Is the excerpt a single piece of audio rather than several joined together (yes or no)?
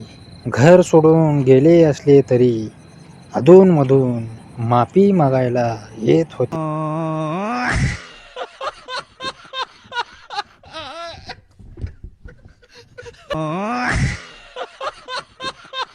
no